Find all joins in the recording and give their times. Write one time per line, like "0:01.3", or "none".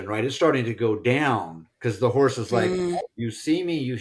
0:03.0